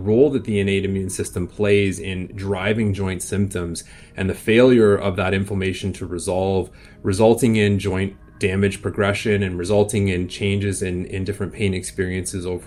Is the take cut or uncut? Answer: uncut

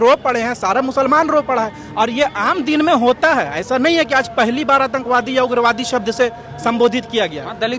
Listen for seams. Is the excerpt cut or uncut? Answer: uncut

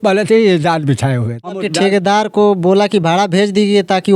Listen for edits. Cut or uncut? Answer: cut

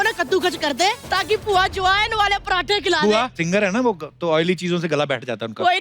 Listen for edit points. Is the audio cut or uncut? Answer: cut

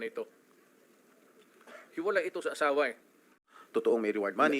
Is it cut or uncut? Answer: cut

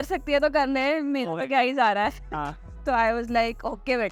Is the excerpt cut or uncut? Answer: uncut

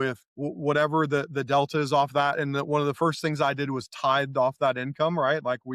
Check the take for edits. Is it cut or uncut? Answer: uncut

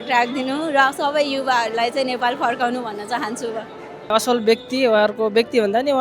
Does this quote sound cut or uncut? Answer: cut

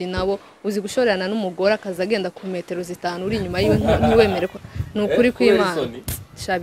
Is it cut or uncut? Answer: uncut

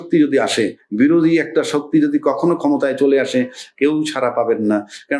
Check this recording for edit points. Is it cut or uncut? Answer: uncut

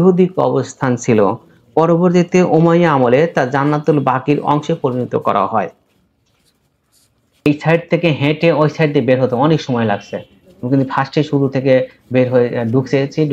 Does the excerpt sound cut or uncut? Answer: cut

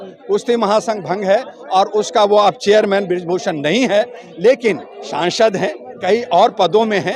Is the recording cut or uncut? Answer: uncut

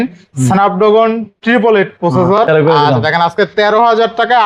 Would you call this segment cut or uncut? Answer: cut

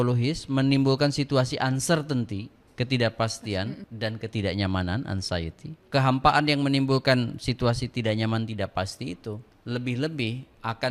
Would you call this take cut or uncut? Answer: cut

